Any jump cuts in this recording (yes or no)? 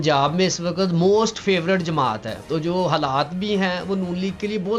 yes